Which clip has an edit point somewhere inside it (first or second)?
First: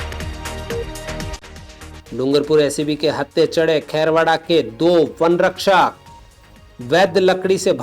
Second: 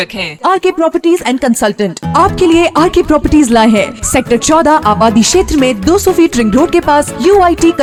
first